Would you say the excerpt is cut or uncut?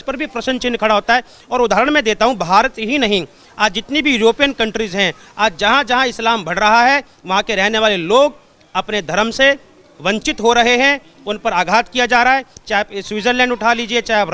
uncut